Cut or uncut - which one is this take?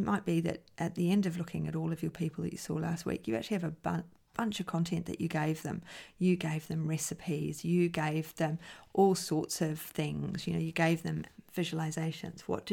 cut